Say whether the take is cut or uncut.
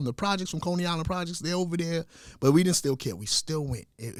uncut